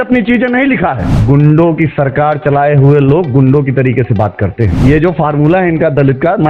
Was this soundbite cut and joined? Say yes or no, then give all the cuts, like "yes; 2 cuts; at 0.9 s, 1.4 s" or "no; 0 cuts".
yes; 2 cuts; at 1.2 s, 4.7 s